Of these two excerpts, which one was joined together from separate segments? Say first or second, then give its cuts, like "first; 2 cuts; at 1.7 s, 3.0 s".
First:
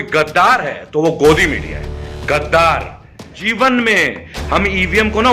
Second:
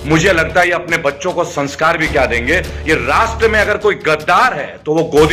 first; 1 cut; at 3.4 s